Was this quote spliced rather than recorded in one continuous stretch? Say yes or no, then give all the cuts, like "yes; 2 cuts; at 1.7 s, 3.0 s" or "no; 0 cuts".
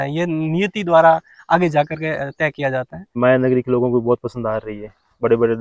yes; 1 cut; at 3.2 s